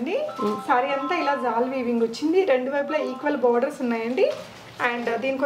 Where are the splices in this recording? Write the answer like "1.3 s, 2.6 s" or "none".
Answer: none